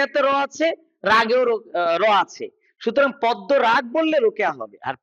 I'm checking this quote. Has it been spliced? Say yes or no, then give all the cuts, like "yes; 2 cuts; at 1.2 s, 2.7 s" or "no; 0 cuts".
no; 0 cuts